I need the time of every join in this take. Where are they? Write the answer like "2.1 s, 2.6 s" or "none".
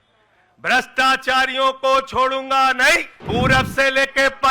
3.1 s